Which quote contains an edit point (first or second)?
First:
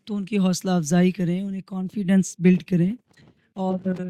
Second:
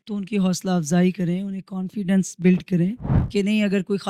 second